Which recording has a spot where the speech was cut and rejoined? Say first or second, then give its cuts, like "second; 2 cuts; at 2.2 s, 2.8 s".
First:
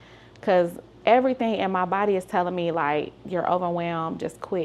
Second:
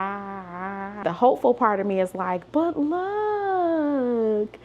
second; 1 cut; at 1.0 s